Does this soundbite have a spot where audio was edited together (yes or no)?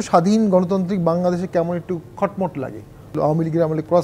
yes